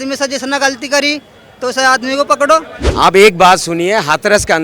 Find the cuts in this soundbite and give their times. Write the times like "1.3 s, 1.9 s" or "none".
2.8 s